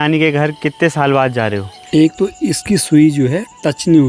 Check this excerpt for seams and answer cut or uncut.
cut